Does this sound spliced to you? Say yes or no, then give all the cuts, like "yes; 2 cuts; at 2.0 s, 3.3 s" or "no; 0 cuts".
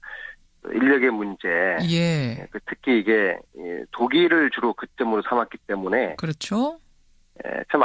yes; 1 cut; at 4.3 s